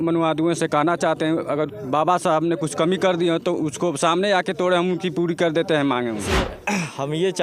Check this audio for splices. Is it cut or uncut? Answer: cut